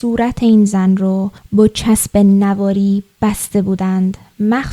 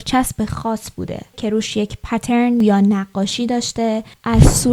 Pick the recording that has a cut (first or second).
second